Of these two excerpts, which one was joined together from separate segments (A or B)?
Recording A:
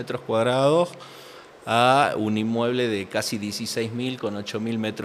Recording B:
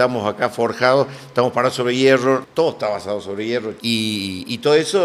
B